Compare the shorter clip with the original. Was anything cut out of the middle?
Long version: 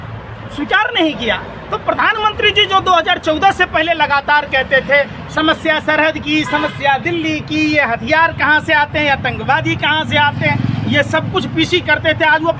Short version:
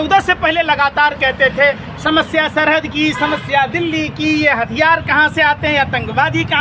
no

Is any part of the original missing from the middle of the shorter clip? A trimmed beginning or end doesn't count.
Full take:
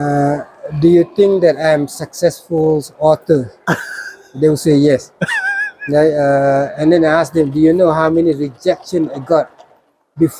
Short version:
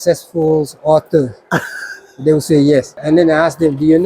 yes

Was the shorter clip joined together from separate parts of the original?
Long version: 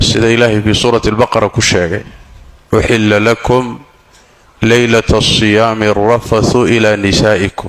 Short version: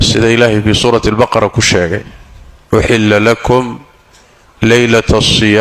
no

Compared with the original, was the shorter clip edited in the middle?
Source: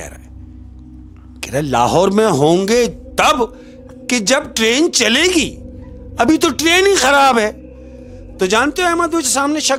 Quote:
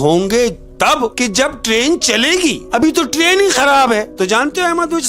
yes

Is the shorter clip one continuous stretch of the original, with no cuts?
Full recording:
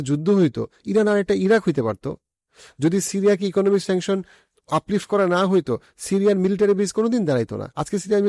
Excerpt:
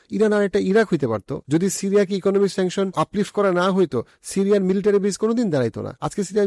no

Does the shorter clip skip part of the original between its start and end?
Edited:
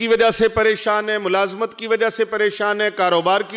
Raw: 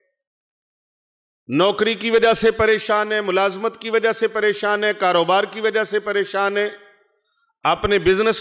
no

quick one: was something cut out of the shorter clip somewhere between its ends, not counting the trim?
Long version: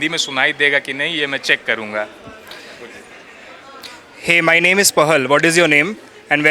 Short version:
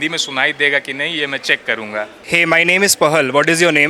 yes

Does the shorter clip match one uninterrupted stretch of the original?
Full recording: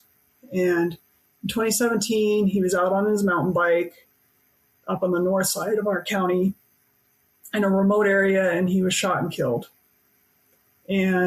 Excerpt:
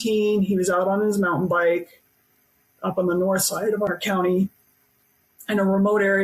yes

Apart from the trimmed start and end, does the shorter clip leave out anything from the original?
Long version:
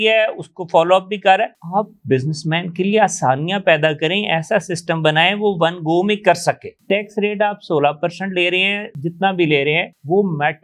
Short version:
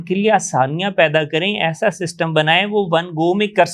no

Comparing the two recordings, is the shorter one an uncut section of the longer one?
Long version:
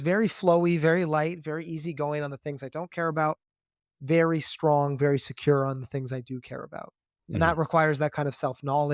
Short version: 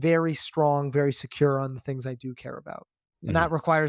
yes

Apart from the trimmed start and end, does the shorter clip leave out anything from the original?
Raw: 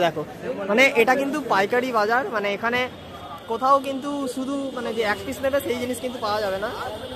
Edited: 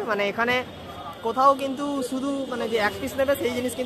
no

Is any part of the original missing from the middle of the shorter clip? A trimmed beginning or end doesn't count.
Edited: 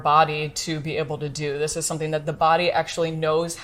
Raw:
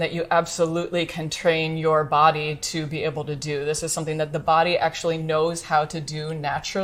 no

